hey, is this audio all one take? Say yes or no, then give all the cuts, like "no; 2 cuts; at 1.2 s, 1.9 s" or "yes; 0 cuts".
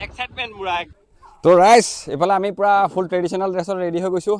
no; 1 cut; at 1.0 s